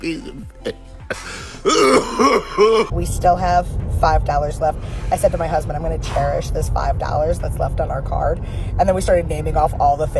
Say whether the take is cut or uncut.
cut